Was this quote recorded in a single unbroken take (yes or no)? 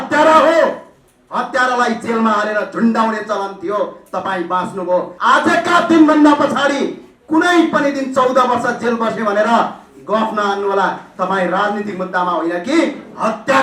no